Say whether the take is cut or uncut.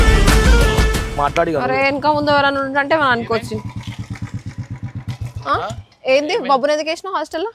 cut